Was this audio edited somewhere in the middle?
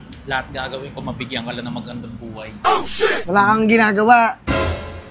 no; 0 cuts

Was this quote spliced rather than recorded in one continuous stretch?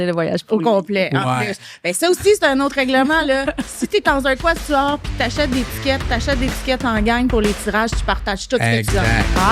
no; 0 cuts

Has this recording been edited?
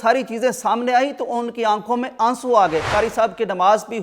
yes; 1 cut; at 2.9 s

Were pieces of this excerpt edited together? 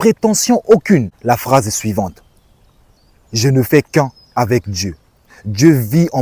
yes; 1 cut; at 1.1 s

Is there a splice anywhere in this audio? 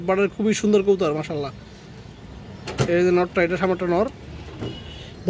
no; 0 cuts

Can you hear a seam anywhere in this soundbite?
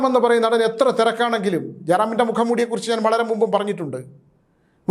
no; 0 cuts

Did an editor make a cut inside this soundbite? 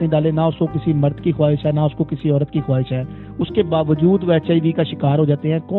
no; 0 cuts

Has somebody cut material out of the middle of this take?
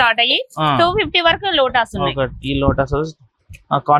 no; 0 cuts

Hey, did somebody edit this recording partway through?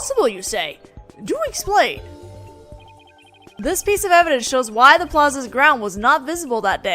no; 0 cuts

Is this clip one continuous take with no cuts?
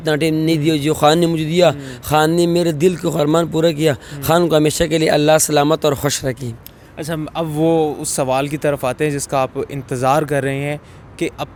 yes; 0 cuts

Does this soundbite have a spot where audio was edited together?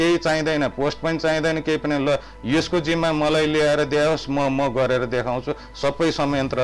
no; 0 cuts

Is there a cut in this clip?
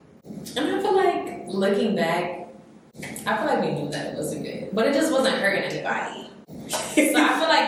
no; 0 cuts

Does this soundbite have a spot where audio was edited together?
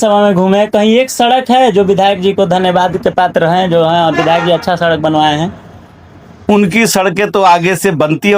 no; 0 cuts

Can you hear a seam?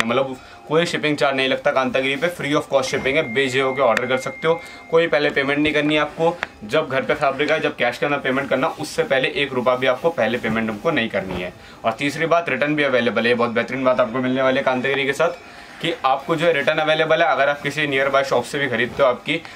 no; 0 cuts

